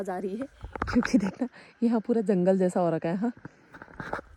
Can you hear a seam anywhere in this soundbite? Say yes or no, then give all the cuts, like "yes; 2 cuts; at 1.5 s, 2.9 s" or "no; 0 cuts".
no; 0 cuts